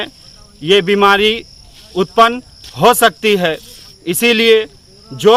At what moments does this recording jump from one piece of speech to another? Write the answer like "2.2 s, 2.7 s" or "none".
none